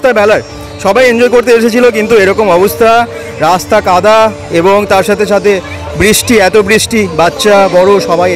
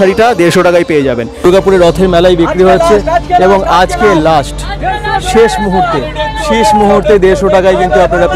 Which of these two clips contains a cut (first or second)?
second